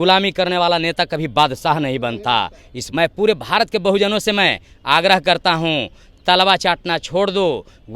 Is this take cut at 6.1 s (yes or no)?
no